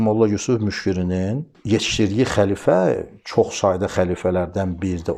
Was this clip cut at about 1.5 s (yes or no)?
yes